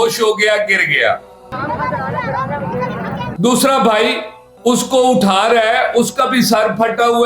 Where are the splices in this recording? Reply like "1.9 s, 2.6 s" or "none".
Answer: none